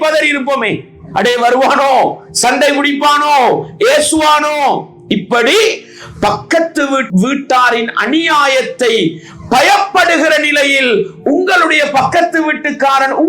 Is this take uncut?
no; 1 cut; at 7.1 s

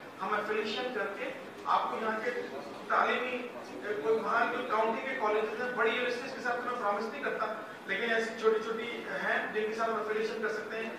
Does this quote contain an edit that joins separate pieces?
no; 0 cuts

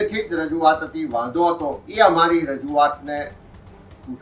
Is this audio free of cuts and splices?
no; 1 cut; at 1.8 s

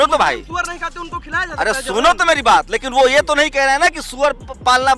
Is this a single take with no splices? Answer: yes; 0 cuts

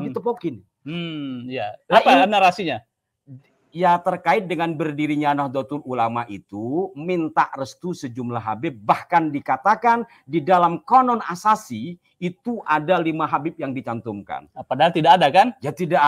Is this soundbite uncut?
yes; 0 cuts

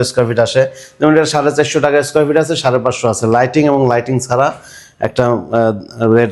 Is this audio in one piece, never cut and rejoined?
yes; 0 cuts

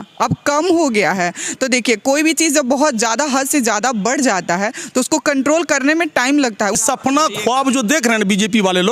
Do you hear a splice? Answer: yes; 1 cut; at 6.8 s

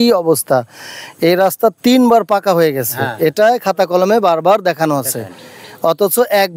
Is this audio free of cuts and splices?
yes; 0 cuts

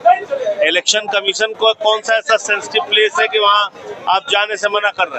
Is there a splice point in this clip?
no; 0 cuts

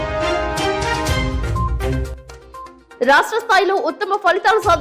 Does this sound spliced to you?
no; 0 cuts

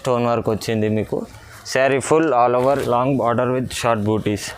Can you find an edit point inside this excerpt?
yes; 1 cut; at 2.8 s

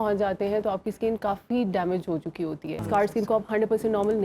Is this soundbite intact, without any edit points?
no; 1 cut; at 2.8 s

